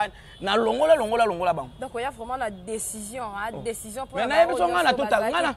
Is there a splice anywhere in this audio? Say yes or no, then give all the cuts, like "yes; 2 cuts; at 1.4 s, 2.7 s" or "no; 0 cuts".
no; 0 cuts